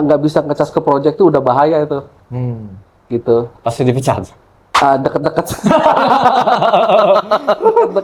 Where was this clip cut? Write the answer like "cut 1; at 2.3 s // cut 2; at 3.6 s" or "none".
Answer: none